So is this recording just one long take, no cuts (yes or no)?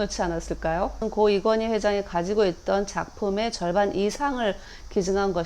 no